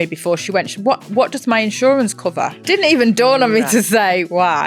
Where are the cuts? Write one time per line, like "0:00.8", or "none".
0:02.6
0:03.7